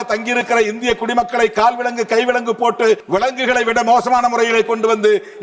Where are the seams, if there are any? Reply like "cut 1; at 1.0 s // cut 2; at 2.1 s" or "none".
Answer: cut 1; at 3.0 s